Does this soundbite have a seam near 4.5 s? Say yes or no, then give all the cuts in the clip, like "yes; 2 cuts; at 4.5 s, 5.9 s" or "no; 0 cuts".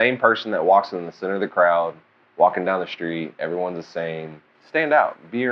yes; 1 cut; at 4.5 s